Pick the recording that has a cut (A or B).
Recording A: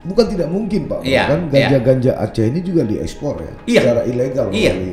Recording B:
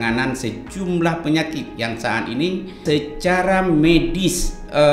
B